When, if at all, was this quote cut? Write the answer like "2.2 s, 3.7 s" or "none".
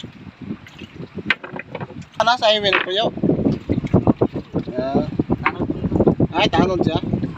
2.2 s